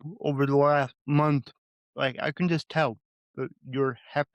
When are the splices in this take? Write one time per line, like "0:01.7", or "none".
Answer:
0:01.0